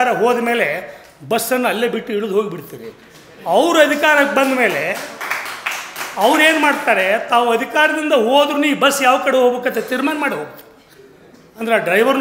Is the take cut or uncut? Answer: uncut